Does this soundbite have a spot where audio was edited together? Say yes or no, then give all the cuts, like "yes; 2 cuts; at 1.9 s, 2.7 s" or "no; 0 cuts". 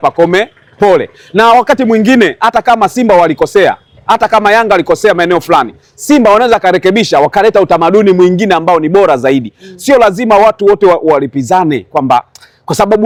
no; 0 cuts